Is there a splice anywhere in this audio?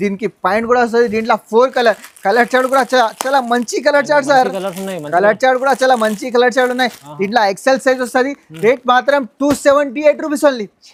no; 0 cuts

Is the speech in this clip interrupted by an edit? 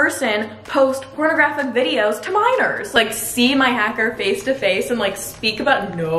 yes; 1 cut; at 2.9 s

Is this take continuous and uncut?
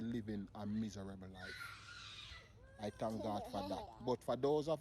no; 1 cut; at 3.9 s

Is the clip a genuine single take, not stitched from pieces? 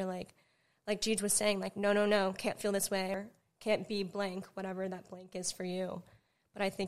no; 1 cut; at 3.2 s

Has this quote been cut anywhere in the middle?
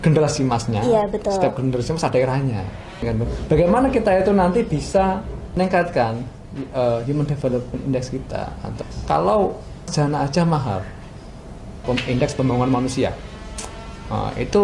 yes; 5 cuts; at 3.0 s, 5.5 s, 8.7 s, 9.9 s, 11.8 s

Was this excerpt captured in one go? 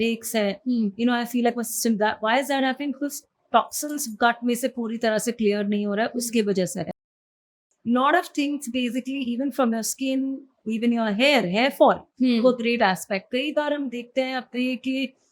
no; 1 cut; at 7.4 s

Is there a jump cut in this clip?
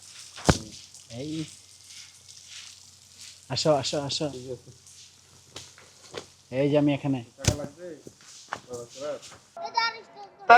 yes; 1 cut; at 9.4 s

